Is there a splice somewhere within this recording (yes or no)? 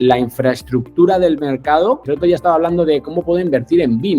yes